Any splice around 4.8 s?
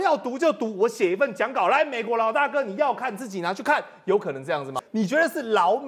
yes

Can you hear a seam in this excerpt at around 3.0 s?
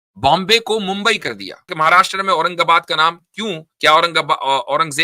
no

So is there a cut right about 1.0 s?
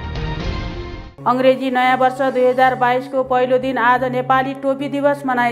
yes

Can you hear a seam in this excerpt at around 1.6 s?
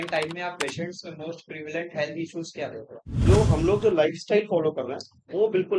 no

